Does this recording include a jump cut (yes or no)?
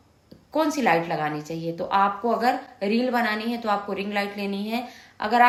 no